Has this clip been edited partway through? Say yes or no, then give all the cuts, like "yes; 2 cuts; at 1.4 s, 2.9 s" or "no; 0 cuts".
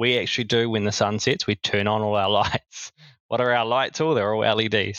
no; 0 cuts